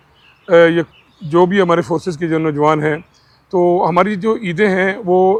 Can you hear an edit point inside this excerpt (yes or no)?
no